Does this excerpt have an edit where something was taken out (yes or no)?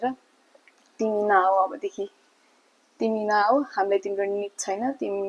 no